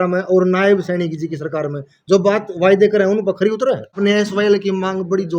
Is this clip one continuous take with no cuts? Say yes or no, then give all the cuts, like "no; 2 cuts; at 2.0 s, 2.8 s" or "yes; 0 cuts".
no; 1 cut; at 3.9 s